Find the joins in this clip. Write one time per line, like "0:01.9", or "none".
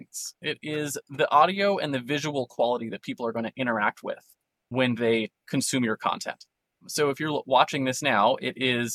0:04.7